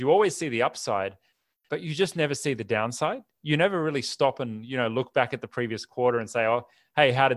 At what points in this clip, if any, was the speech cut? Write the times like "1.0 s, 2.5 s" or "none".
none